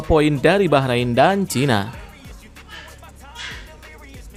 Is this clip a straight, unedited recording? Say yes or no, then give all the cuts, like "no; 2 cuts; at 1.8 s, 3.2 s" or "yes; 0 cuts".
yes; 0 cuts